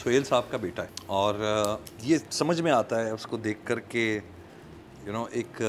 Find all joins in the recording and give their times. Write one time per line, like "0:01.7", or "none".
0:00.9
0:01.9

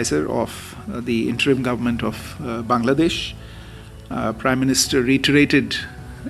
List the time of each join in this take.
none

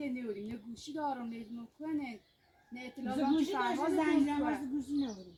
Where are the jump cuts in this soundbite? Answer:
none

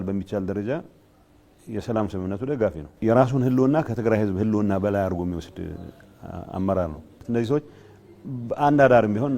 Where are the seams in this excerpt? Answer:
0:02.9
0:07.1

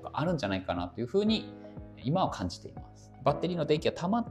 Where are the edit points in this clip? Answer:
0:03.1

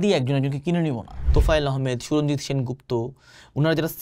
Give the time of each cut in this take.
0:01.1

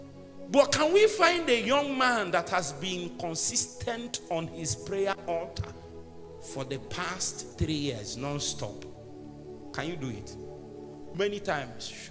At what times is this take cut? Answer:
0:11.1

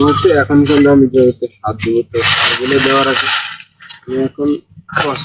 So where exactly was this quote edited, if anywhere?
none

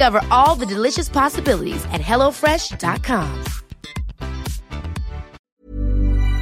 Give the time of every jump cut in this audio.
0:05.4

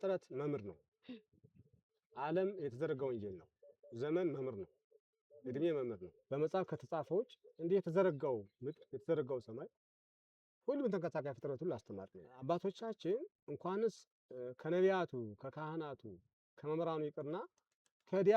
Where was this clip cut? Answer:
0:06.1
0:12.4

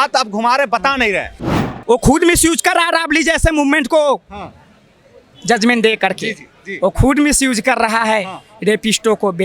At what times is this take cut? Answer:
0:01.5

